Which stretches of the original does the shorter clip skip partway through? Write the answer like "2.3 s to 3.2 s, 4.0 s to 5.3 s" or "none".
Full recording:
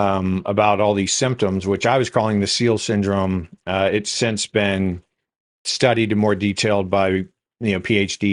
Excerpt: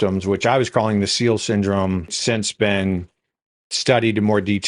3.6 s to 4.1 s

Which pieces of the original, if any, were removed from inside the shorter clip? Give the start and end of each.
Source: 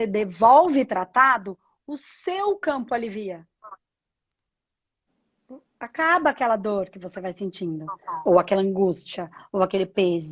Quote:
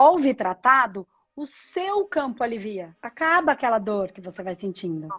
3.5 s to 5.8 s

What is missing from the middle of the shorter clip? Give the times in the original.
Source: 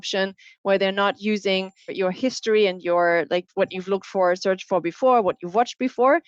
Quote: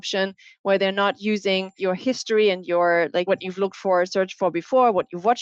1.7 s to 1.9 s, 3.4 s to 3.5 s

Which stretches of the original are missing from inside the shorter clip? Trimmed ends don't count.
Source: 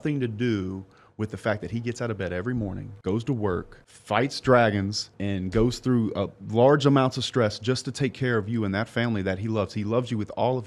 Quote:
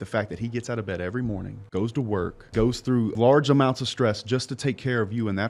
4.0 s to 6.1 s

